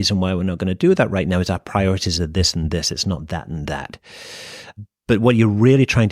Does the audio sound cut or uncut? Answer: cut